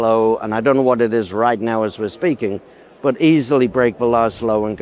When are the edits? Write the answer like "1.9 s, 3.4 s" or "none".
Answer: none